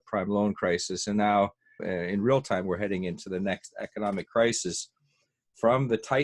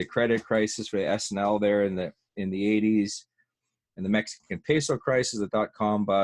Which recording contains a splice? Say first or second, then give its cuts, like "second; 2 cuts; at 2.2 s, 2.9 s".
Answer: first; 1 cut; at 1.8 s